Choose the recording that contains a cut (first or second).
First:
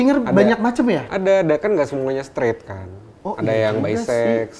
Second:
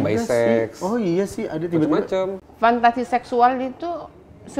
second